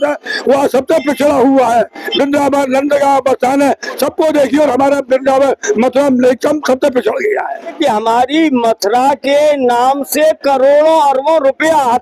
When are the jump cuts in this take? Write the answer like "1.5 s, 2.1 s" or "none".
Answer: 7.8 s